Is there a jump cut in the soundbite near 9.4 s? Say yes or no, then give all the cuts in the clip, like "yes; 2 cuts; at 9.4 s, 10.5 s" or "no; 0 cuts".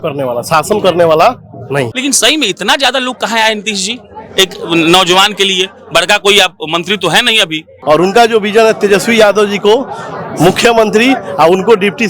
no; 2 cuts; at 1.9 s, 7.7 s